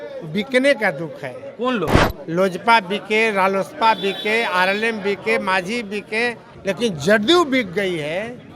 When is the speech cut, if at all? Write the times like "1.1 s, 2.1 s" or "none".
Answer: 1.9 s, 6.5 s